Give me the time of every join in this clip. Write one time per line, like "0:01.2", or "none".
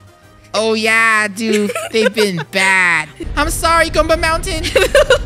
0:03.2

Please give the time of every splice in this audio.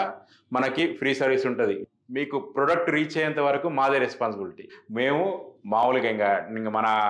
0:01.9
0:04.6

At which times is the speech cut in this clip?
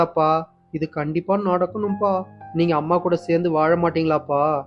none

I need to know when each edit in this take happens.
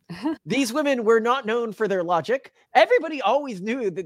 0:02.6

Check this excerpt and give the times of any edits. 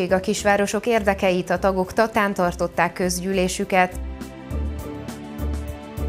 none

